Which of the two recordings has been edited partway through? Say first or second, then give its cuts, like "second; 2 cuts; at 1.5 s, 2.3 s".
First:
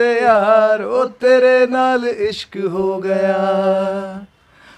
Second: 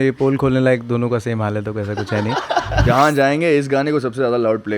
second; 1 cut; at 2.8 s